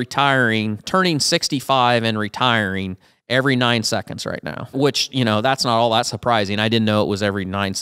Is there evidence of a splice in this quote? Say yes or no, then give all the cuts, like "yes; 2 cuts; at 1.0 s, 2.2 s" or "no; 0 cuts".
yes; 1 cut; at 4.7 s